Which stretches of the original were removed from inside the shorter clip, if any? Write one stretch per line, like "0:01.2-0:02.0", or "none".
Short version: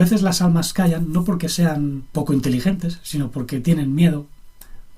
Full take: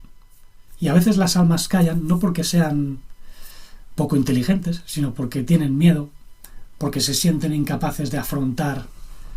0:03.0-0:03.9